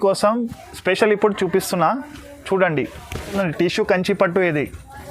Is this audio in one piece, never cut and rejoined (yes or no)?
no